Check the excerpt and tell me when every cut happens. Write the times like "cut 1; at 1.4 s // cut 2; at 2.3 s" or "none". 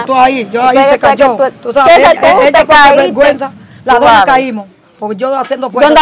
none